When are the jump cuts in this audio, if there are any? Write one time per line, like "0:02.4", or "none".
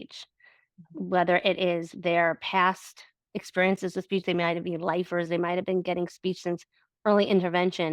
none